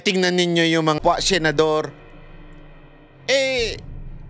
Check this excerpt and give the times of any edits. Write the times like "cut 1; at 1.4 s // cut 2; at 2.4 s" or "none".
cut 1; at 1.0 s